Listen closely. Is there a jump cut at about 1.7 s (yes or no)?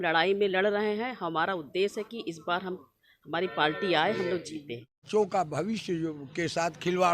no